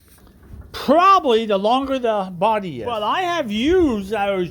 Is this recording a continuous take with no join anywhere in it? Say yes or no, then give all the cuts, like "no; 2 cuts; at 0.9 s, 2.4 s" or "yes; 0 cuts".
no; 1 cut; at 2.8 s